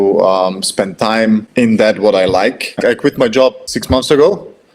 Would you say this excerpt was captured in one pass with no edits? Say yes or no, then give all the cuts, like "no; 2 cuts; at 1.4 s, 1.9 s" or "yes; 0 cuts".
no; 3 cuts; at 1.5 s, 2.8 s, 3.7 s